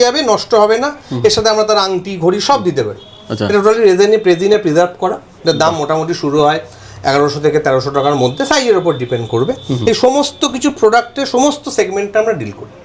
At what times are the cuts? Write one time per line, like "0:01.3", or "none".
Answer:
none